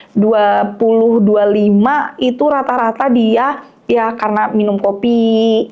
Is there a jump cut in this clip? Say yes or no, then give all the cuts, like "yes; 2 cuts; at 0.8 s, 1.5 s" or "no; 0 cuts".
no; 0 cuts